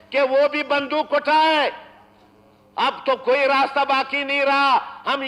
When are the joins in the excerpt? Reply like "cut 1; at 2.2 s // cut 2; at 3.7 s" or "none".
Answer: none